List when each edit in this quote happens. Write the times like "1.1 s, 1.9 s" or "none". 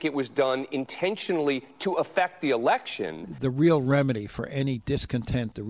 3.2 s